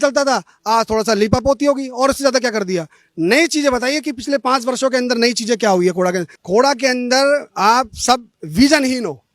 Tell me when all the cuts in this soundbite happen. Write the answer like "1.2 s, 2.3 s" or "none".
6.3 s